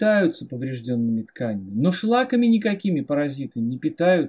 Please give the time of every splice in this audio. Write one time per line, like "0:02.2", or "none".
none